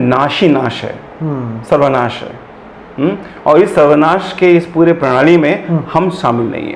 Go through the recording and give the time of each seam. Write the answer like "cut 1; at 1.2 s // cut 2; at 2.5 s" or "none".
none